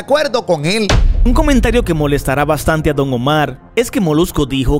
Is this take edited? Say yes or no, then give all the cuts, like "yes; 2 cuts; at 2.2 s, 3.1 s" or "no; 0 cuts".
yes; 1 cut; at 1.3 s